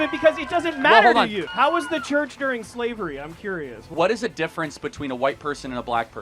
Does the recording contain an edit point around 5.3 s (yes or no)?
no